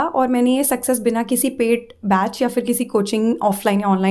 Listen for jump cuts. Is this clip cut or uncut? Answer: uncut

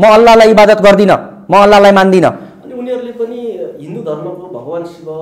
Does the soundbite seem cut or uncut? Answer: uncut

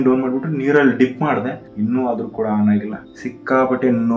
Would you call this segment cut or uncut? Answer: cut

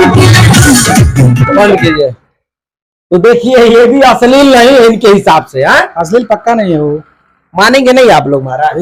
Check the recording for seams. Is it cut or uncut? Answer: uncut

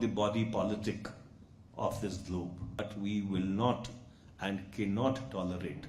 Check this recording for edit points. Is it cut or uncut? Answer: cut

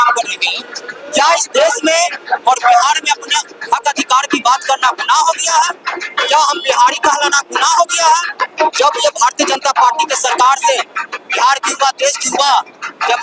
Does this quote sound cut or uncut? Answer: uncut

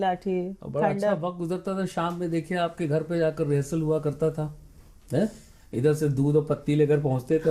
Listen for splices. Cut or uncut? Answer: uncut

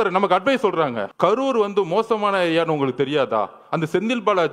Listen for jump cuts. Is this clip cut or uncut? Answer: cut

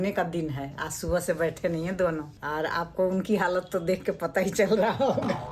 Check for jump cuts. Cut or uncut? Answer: uncut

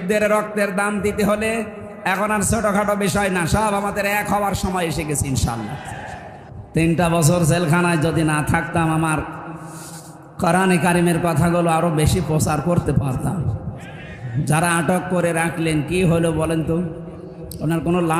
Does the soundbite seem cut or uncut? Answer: cut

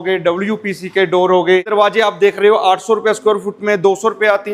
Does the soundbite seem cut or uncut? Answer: cut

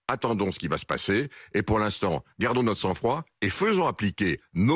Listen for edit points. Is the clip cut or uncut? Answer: uncut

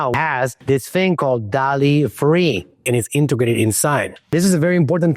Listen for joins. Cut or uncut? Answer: cut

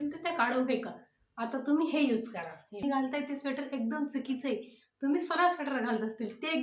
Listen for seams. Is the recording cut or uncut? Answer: cut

